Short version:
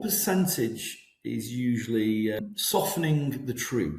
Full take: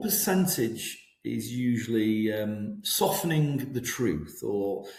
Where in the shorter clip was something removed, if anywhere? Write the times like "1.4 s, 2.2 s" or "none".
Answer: 2.4 s

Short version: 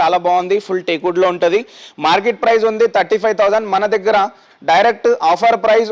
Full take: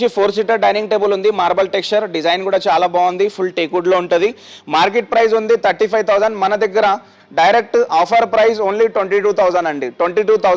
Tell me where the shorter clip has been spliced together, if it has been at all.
none

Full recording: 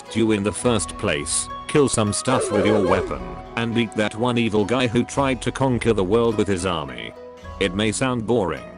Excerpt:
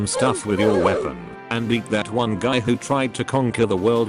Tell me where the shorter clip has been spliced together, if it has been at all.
2.4 s

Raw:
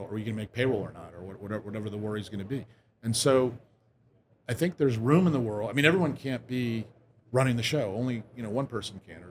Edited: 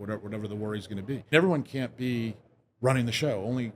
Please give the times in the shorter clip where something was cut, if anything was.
1.3 s

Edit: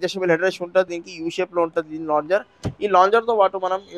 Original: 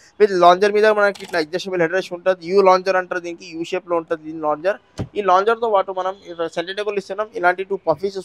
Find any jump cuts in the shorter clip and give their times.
0.9 s

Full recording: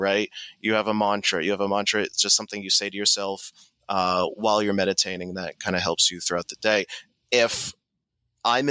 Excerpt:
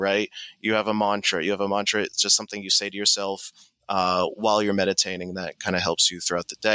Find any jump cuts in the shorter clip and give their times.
none

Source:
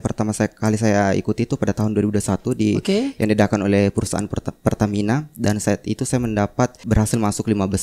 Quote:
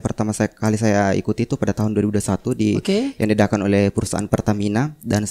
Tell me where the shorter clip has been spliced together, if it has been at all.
4.2 s

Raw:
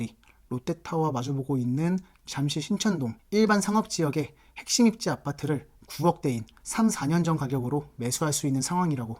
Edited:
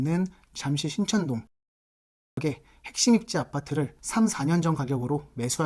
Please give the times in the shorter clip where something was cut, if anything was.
4.0 s

